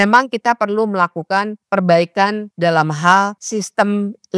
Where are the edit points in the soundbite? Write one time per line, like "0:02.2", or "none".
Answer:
0:01.6
0:02.5
0:03.4